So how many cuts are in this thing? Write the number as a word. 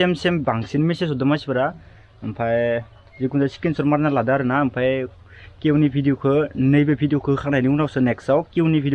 zero